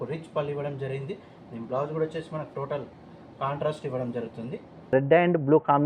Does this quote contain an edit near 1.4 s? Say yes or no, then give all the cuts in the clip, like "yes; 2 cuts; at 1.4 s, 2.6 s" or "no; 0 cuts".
no; 1 cut; at 4.9 s